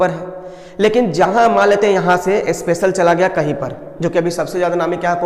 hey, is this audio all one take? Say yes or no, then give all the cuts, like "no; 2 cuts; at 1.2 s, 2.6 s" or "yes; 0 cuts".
yes; 0 cuts